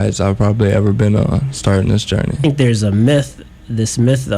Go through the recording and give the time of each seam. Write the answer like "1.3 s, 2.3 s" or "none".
2.4 s